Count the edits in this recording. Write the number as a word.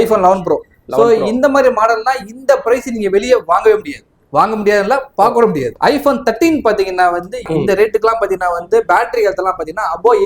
two